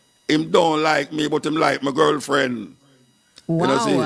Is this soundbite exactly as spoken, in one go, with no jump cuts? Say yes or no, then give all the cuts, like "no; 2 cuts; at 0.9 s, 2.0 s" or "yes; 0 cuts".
yes; 0 cuts